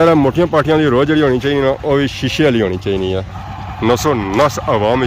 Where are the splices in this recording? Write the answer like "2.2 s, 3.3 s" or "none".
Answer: 3.3 s